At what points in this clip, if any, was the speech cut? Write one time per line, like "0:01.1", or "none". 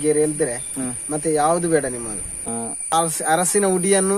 0:02.9